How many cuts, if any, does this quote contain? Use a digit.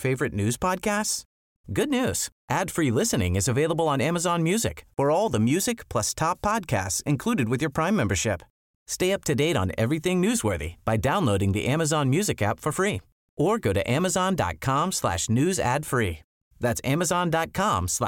0